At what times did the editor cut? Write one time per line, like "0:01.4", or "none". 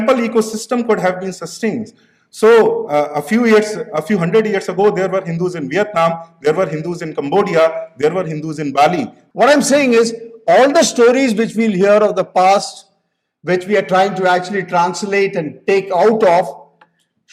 0:09.2